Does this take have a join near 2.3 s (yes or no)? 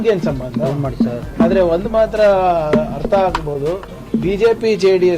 no